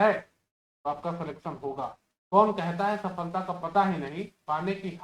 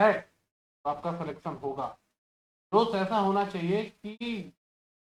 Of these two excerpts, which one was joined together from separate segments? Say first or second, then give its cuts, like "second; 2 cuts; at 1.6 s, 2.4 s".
first; 1 cut; at 2.1 s